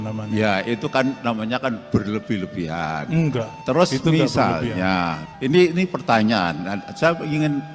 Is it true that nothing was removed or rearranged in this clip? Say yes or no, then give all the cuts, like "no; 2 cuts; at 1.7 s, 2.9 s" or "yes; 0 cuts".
no; 2 cuts; at 3.5 s, 5.2 s